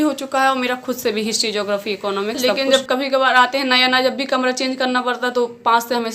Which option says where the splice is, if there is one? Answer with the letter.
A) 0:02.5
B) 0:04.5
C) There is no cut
A